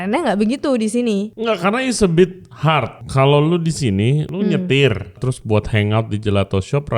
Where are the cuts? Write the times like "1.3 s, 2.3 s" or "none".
1.3 s, 3.0 s, 4.3 s, 5.3 s